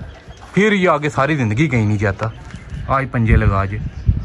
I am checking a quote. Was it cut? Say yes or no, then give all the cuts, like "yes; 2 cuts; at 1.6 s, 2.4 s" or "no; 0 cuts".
no; 0 cuts